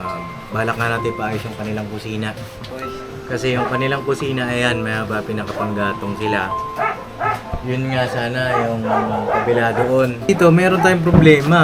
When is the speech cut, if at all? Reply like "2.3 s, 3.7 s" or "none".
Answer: 10.3 s